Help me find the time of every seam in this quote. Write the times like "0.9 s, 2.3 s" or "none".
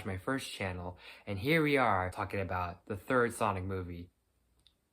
2.2 s